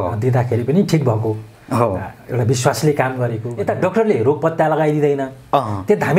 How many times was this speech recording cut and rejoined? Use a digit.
1